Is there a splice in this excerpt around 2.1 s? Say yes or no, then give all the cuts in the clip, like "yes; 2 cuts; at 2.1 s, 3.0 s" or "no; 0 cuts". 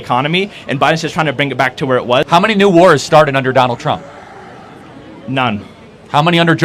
yes; 1 cut; at 2.1 s